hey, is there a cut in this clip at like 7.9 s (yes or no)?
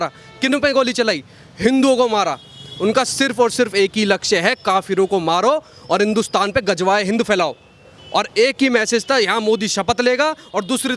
no